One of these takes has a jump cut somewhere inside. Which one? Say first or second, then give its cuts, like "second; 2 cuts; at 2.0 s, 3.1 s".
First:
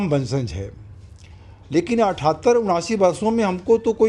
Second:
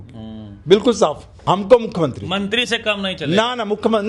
second; 1 cut; at 1.3 s